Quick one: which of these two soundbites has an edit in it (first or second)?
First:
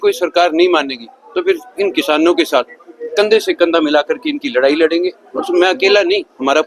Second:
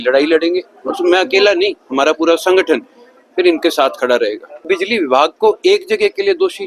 second